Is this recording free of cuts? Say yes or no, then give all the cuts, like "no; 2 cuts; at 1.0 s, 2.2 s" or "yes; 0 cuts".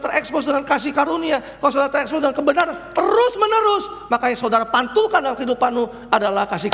yes; 0 cuts